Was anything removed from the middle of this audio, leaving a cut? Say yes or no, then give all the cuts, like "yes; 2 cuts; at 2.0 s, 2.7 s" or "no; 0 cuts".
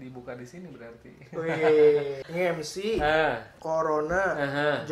yes; 1 cut; at 2.2 s